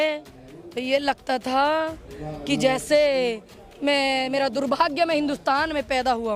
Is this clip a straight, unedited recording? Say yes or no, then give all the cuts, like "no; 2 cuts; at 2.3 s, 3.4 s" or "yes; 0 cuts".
yes; 0 cuts